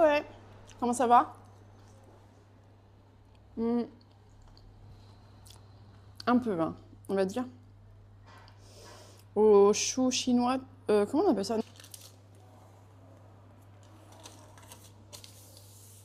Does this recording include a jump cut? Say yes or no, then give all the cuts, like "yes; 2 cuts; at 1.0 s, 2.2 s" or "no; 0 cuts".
no; 0 cuts